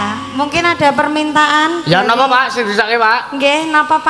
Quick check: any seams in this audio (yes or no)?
no